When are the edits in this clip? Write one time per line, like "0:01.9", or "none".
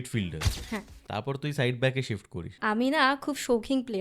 0:01.0
0:02.6